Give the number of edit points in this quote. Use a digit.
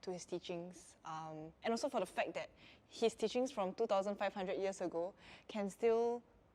0